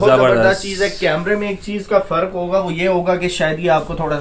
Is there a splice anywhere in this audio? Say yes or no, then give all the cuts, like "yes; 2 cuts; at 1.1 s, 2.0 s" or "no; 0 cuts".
no; 0 cuts